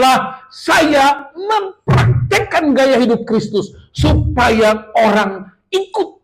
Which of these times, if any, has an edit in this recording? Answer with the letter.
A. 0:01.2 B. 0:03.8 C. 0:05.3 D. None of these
D